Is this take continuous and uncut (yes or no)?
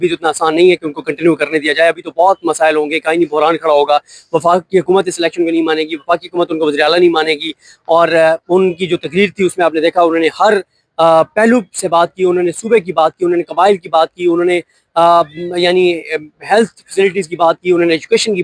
yes